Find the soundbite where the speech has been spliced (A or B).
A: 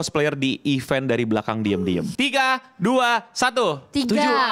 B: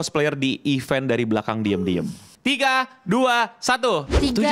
A